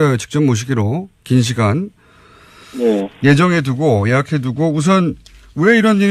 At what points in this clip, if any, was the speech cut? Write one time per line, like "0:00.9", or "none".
0:01.7